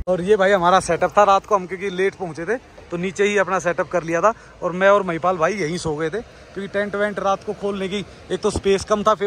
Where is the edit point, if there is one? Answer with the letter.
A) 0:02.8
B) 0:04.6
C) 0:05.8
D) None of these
D